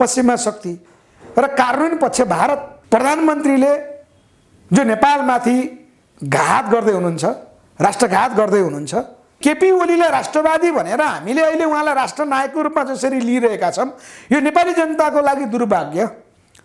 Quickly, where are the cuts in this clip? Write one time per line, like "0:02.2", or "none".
0:02.7
0:09.3